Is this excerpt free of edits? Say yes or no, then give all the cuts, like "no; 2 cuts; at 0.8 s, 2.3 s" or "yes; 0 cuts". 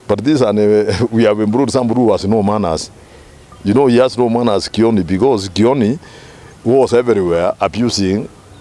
yes; 0 cuts